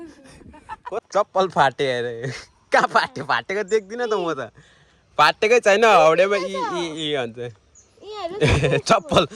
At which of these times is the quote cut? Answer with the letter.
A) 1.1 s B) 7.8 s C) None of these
A